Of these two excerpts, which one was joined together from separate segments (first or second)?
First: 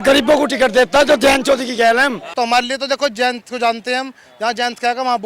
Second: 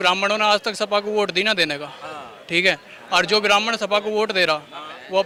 first